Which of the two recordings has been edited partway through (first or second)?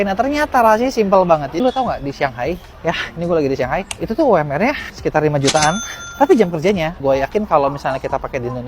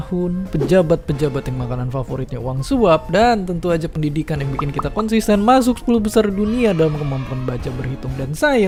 first